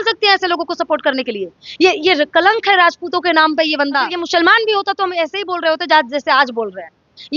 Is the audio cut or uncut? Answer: cut